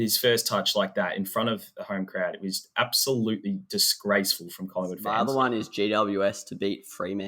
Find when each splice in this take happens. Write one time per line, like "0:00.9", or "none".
0:05.0